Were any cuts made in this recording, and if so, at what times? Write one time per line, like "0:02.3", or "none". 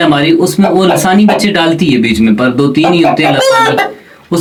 none